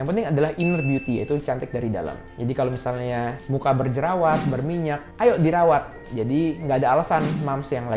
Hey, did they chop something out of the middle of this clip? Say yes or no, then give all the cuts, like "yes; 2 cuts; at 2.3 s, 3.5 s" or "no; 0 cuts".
no; 0 cuts